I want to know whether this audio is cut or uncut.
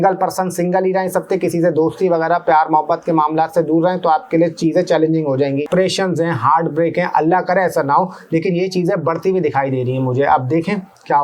cut